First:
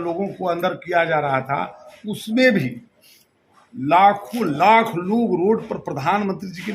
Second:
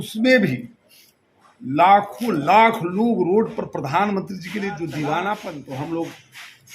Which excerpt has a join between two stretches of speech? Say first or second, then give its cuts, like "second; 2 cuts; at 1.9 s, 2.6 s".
second; 1 cut; at 5.6 s